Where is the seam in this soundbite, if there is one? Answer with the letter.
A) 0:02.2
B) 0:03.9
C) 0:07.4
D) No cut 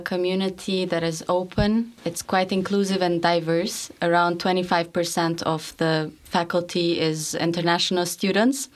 D